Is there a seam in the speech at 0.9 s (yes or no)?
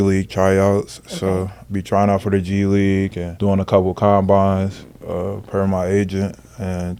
no